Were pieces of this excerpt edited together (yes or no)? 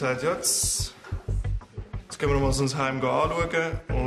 no